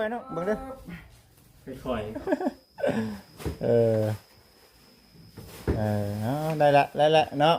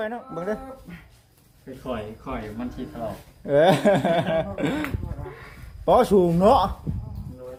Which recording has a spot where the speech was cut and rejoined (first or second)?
first